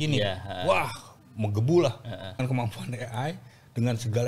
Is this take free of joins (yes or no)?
no